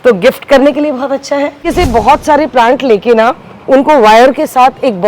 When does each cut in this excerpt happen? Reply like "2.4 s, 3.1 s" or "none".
1.6 s